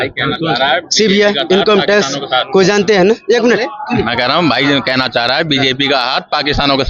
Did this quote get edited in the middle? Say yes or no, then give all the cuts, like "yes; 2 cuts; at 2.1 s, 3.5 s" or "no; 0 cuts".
no; 0 cuts